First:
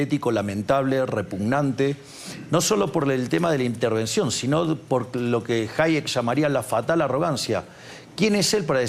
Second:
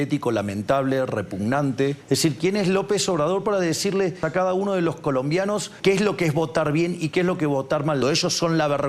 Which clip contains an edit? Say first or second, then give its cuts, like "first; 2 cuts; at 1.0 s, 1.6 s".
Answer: second; 4 cuts; at 2.0 s, 4.2 s, 5.7 s, 8.0 s